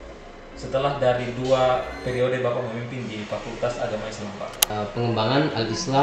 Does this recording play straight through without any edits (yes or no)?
no